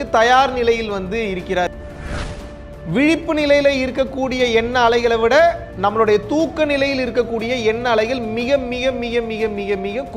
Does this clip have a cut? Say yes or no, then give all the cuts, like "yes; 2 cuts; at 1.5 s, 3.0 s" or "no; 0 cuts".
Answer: yes; 2 cuts; at 2.3 s, 5.7 s